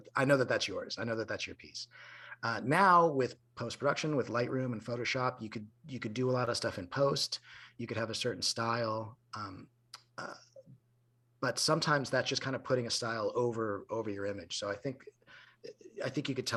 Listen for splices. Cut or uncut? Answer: uncut